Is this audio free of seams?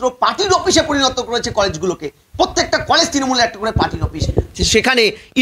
yes; 0 cuts

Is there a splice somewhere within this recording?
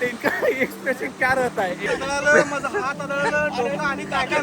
yes; 1 cut; at 1.8 s

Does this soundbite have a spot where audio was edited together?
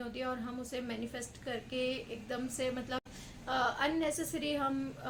no; 0 cuts

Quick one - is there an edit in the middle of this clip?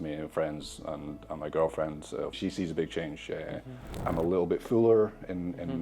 yes; 2 cuts; at 2.4 s, 4.0 s

